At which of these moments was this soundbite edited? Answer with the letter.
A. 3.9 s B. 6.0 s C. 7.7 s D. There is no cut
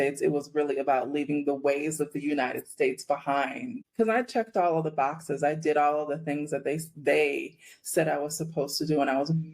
D